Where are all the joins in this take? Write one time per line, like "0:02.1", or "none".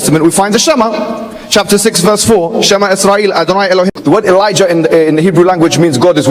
0:04.0